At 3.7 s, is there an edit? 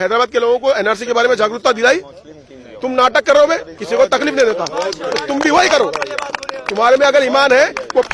yes; 1 cut; at 3.7 s

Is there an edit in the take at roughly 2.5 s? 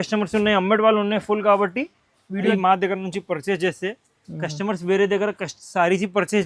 yes; 1 cut; at 2.5 s

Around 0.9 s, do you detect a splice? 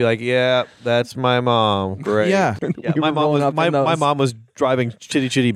no; 1 cut; at 2.6 s

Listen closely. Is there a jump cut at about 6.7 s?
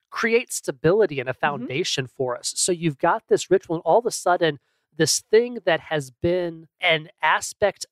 yes; 1 cut; at 6.7 s

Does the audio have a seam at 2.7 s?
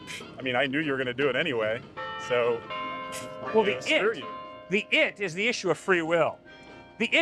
no; 0 cuts

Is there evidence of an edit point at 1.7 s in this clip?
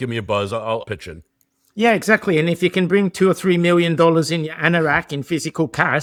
no; 0 cuts

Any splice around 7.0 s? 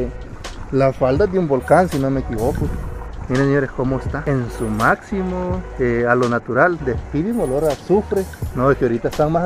no; 3 cuts; at 4.2 s, 5.7 s, 8.4 s

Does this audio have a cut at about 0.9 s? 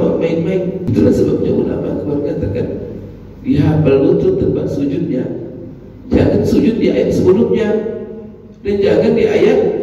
yes; 1 cut; at 0.9 s

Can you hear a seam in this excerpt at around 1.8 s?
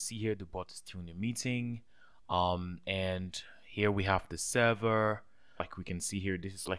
no; 1 cut; at 5.7 s

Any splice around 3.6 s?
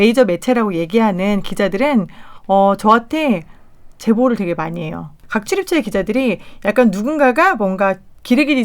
no; 1 cut; at 5.1 s

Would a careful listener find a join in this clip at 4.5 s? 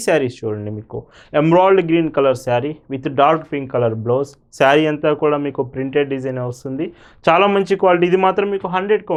no; 0 cuts

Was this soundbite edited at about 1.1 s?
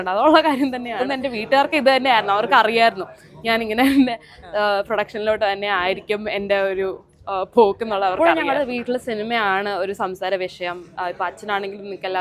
yes; 2 cuts; at 1.1 s, 8.2 s

